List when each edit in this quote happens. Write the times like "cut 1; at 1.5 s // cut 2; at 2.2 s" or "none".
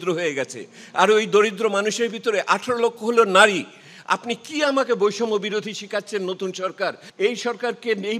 cut 1; at 7.0 s

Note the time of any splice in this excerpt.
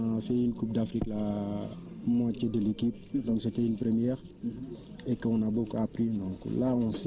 cut 1; at 3.9 s

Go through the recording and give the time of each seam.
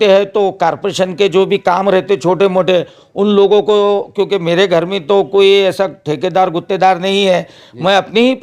none

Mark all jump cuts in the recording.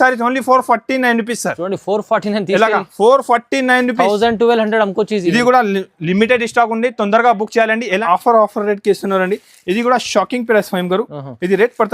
cut 1; at 8.0 s

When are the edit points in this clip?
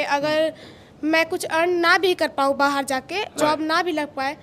cut 1; at 3.3 s

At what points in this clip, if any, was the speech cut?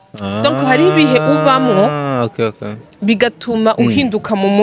none

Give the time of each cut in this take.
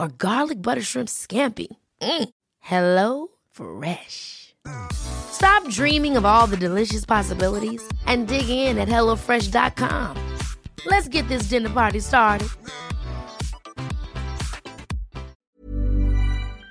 cut 1; at 15.4 s

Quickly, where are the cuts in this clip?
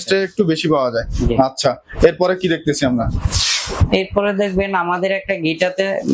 none

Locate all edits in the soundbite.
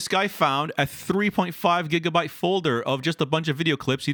none

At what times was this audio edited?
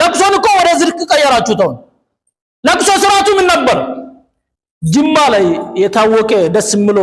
none

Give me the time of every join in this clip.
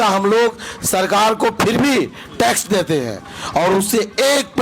none

